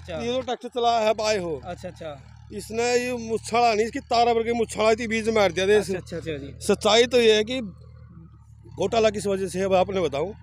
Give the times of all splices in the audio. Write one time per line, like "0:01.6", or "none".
none